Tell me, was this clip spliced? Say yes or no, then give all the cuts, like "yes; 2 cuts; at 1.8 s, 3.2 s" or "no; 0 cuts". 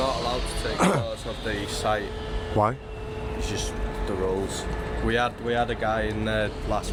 no; 0 cuts